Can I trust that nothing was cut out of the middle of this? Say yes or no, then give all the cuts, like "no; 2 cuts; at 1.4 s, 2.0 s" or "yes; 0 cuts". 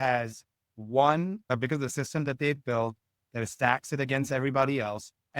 no; 1 cut; at 1.4 s